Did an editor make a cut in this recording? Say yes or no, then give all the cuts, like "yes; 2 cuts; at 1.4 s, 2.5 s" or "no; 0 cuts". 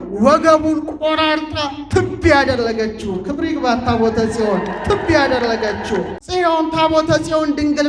yes; 1 cut; at 6.2 s